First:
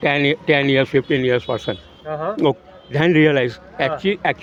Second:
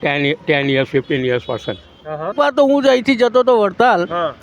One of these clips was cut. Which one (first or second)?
second